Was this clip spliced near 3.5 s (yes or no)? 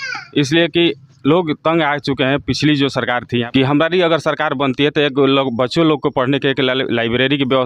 yes